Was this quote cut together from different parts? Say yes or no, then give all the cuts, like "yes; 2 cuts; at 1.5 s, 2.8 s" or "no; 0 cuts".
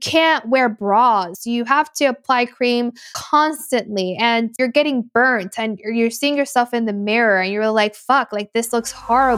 yes; 3 cuts; at 1.3 s, 3.1 s, 4.5 s